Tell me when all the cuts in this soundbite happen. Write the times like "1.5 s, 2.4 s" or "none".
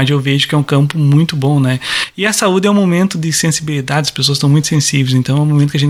none